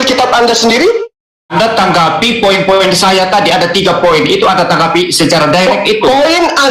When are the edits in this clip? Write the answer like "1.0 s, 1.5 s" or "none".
1.5 s